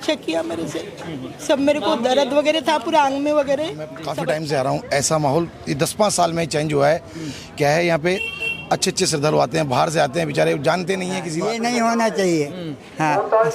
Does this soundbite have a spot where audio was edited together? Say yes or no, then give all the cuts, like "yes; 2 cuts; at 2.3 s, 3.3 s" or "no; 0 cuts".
yes; 2 cuts; at 4.0 s, 11.3 s